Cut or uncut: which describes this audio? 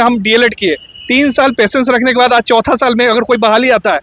uncut